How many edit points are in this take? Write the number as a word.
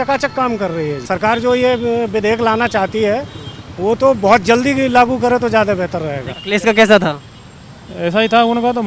two